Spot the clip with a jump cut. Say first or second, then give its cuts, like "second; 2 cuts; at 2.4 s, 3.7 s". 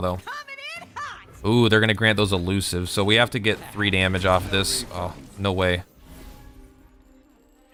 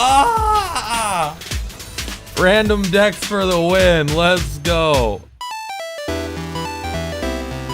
second; 1 cut; at 5.3 s